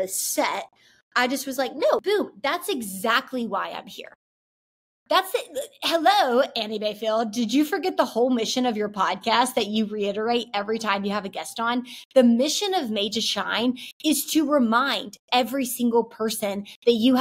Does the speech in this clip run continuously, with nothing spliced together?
no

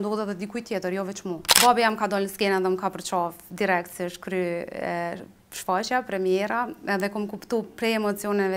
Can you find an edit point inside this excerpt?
yes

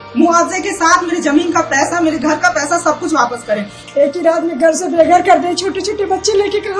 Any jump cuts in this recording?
yes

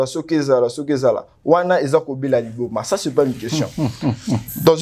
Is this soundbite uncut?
yes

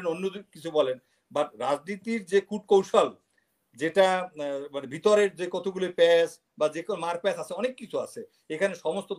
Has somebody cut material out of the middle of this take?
no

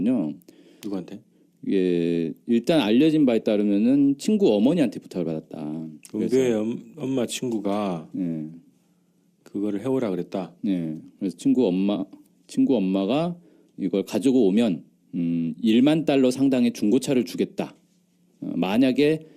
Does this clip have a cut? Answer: yes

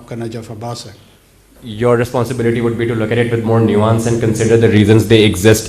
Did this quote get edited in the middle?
yes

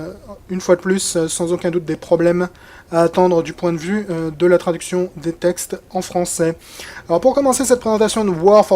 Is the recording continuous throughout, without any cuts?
no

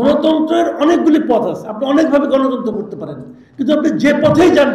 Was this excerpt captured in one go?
yes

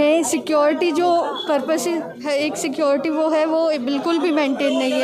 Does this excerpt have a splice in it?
no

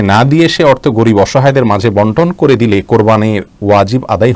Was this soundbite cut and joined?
no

